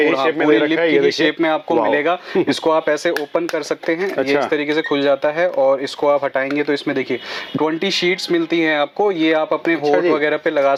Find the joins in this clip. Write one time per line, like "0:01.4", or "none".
none